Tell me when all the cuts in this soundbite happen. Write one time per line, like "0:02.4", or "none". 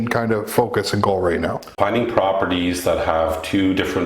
0:01.7